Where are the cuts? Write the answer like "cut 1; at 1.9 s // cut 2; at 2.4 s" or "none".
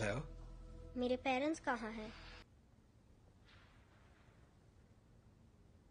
cut 1; at 2.5 s